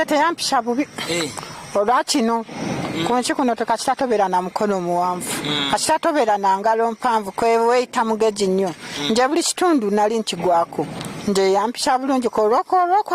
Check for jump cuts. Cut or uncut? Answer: uncut